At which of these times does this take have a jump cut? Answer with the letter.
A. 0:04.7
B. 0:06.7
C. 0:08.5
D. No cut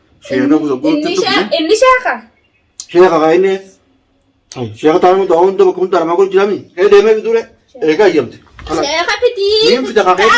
B